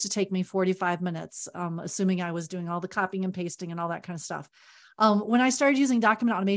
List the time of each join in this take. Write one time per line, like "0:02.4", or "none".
none